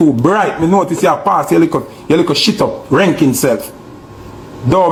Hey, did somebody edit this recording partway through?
no; 0 cuts

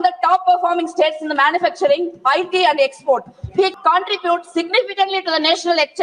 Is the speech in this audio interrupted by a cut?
yes; 1 cut; at 3.7 s

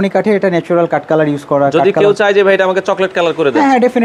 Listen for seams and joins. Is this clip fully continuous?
yes; 0 cuts

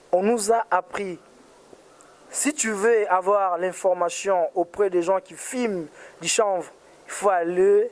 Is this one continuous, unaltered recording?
yes; 0 cuts

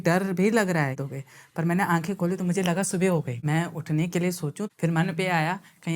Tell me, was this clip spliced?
yes; 3 cuts; at 1.0 s, 3.3 s, 4.7 s

